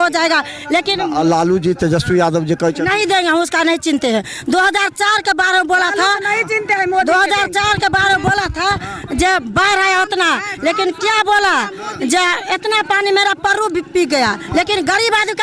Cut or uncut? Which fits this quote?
uncut